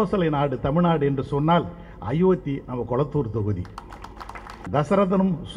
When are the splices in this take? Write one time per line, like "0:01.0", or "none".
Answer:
0:04.6